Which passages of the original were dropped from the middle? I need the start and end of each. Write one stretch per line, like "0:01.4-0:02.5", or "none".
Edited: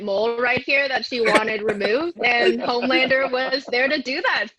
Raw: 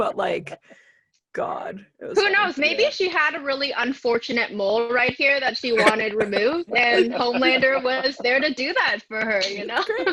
none